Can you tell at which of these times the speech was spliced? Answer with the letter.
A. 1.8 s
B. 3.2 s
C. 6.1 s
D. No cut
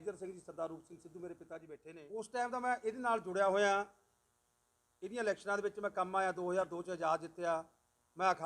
A